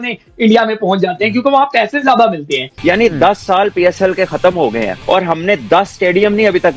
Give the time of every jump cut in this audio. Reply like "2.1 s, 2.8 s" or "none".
2.7 s, 5.0 s